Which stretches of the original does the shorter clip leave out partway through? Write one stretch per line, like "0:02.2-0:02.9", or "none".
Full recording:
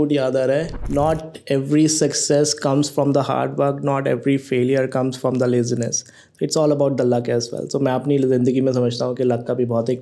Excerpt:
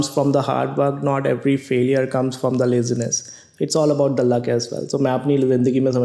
none